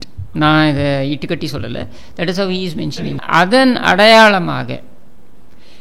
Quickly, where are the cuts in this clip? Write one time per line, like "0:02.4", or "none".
0:03.2